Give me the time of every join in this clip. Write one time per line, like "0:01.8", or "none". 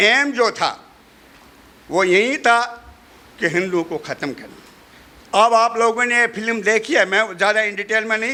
none